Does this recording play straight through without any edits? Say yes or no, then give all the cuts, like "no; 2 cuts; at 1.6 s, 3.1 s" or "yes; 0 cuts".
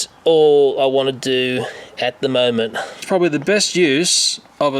no; 1 cut; at 3.0 s